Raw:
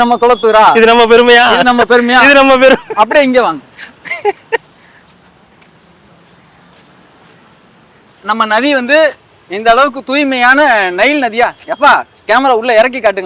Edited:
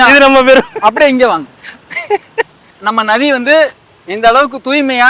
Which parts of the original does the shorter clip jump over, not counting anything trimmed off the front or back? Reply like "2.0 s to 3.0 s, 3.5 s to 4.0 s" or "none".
4.8 s to 8.1 s